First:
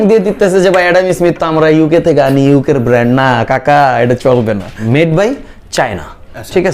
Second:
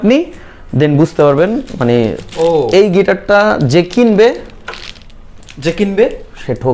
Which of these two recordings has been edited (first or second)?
first